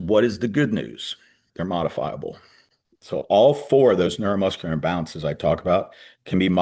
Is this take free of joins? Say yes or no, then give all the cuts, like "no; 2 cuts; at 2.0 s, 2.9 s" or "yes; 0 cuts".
no; 1 cut; at 1.4 s